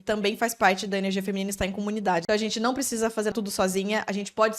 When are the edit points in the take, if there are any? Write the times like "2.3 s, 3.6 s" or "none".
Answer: 2.2 s, 3.3 s